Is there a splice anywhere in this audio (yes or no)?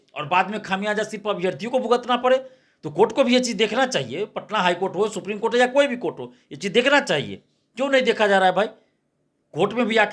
no